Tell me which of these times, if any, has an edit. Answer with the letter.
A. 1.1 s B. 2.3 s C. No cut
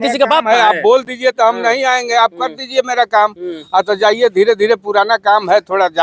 C